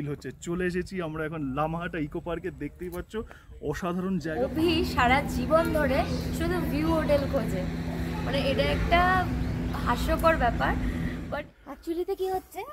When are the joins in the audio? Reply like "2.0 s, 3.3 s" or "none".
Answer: 4.3 s, 11.2 s